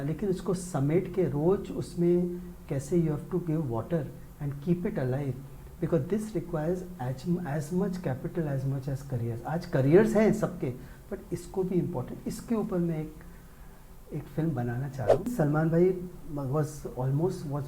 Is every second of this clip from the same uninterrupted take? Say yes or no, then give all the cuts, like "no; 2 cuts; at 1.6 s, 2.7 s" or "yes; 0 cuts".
no; 1 cut; at 15.3 s